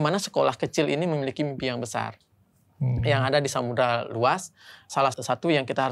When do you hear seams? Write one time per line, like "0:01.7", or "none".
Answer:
0:05.0